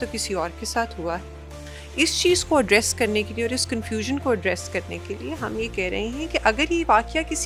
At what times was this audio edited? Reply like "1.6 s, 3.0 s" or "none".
none